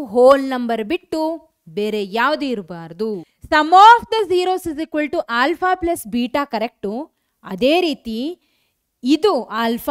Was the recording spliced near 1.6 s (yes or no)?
no